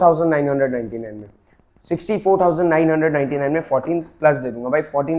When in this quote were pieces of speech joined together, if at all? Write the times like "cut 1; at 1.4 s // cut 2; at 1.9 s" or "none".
none